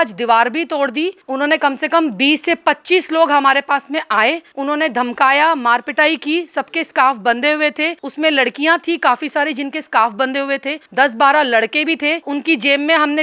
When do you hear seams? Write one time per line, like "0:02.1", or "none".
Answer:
0:01.2
0:04.5
0:08.0
0:10.8
0:12.2